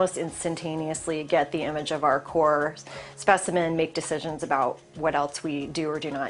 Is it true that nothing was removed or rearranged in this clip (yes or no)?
yes